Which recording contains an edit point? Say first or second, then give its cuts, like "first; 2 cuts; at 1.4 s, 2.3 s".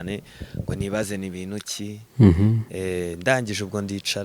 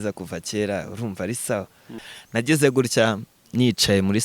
second; 1 cut; at 2.0 s